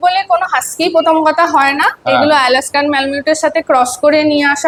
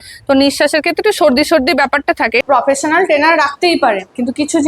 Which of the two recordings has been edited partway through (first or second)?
second